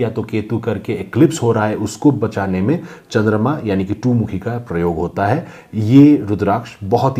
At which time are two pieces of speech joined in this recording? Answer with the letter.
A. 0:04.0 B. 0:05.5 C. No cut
C